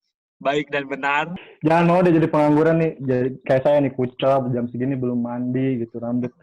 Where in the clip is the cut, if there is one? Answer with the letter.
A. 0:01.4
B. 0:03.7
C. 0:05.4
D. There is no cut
A